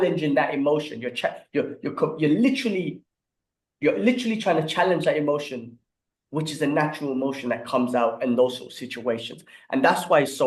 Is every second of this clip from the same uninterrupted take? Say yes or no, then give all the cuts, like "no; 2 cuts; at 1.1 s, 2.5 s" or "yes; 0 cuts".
yes; 0 cuts